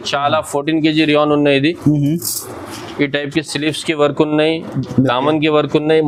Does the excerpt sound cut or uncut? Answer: uncut